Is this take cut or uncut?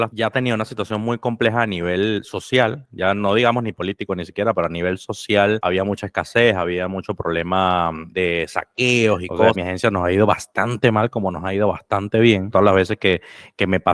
cut